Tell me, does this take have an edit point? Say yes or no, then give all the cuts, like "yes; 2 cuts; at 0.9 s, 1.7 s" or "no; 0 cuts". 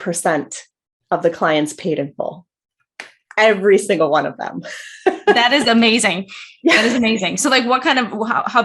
no; 0 cuts